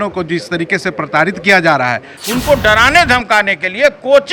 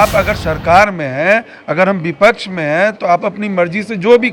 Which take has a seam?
first; 1 cut; at 2.2 s

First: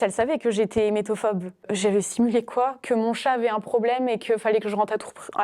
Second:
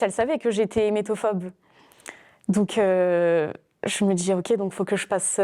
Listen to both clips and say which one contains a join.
first; 1 cut; at 1.6 s

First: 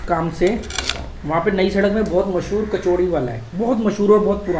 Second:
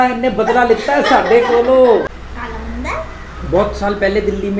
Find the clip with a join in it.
second; 1 cut; at 2.1 s

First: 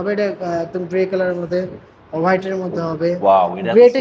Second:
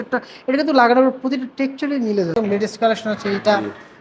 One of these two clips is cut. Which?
second; 1 cut; at 2.3 s

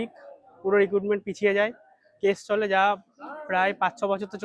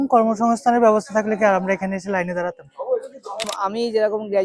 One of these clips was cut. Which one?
second; 1 cut; at 3.5 s

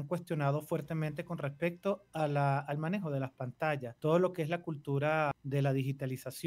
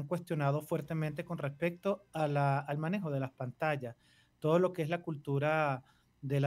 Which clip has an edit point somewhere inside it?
first; 2 cuts; at 3.9 s, 5.4 s

